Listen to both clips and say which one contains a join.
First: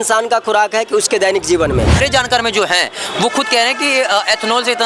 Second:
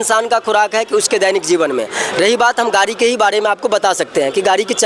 first; 1 cut; at 2.0 s

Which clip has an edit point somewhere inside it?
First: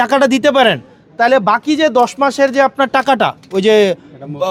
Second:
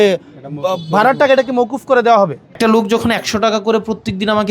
second; 1 cut; at 2.5 s

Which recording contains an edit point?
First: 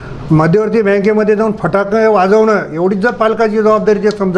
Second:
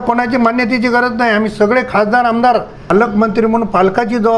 second; 1 cut; at 2.9 s

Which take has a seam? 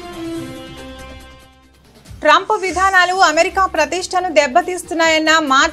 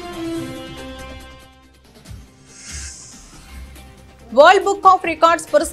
second; 2 cuts; at 1.5 s, 4.3 s

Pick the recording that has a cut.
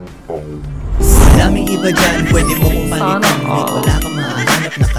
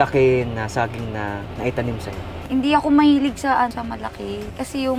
second; 3 cuts; at 1.5 s, 2.5 s, 4.2 s

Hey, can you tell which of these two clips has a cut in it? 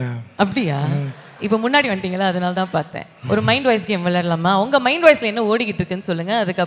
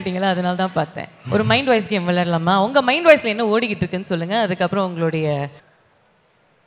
second; 1 cut; at 5.6 s

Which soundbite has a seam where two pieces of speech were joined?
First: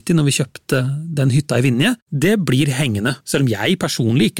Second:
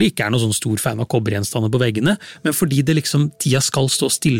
first; 3 cuts; at 0.8 s, 2.1 s, 3.2 s

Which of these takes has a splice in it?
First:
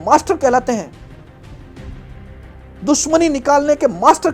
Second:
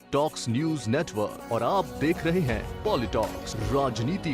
first; 2 cuts; at 0.9 s, 2.7 s

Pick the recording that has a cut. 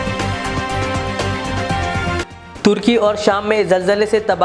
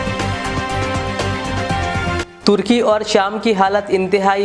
second; 1 cut; at 2.2 s

